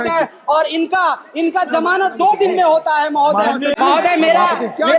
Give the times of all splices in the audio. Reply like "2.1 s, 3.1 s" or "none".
3.7 s